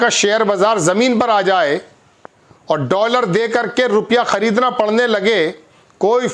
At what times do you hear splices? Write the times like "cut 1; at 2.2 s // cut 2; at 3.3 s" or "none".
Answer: none